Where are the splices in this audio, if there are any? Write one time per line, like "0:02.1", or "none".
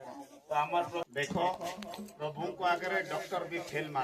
0:01.1

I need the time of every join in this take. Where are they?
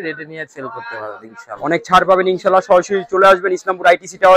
none

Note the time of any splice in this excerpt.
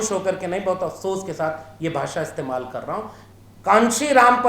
0:03.2

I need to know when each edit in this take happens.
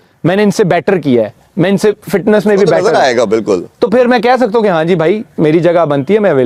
none

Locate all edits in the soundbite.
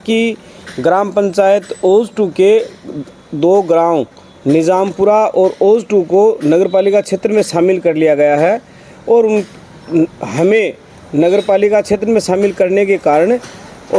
none

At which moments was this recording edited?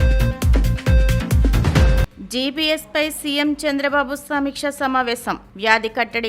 0:01.3

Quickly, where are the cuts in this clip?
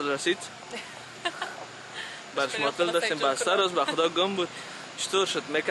none

